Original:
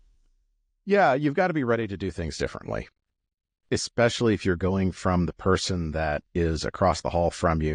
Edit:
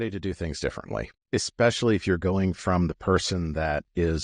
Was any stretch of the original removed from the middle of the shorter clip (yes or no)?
yes